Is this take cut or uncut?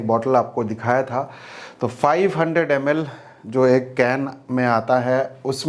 uncut